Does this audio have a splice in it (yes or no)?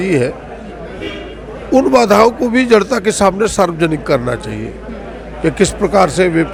no